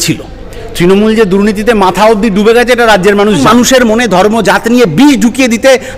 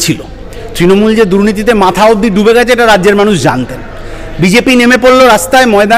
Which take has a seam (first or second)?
first